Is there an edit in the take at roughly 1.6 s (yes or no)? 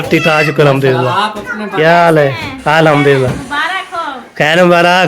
yes